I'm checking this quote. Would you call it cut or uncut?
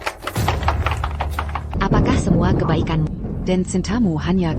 cut